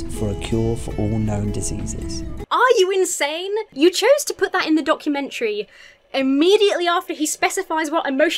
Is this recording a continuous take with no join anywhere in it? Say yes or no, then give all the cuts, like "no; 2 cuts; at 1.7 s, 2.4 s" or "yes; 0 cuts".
no; 2 cuts; at 2.4 s, 3.7 s